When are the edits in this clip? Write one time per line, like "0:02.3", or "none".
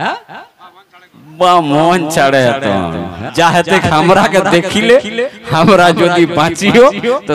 0:03.1